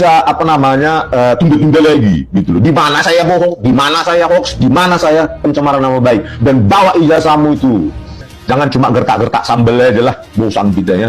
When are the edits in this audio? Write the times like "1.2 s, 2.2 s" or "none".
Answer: 8.3 s

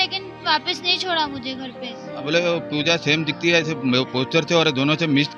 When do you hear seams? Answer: 2.1 s

